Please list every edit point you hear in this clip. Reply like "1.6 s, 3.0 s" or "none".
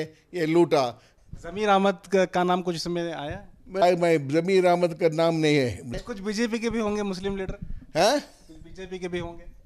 1.1 s, 6.0 s